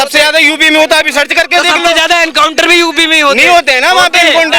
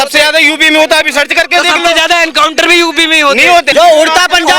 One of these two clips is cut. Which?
second; 1 cut; at 3.7 s

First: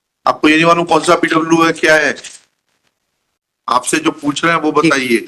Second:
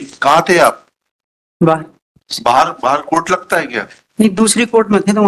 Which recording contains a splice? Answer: first; 1 cut; at 3.6 s

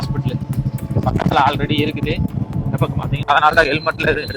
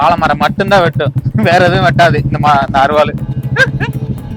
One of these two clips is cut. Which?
first; 1 cut; at 3.3 s

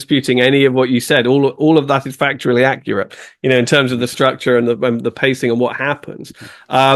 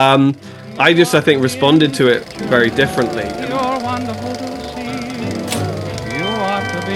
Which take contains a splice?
second; 1 cut; at 3.2 s

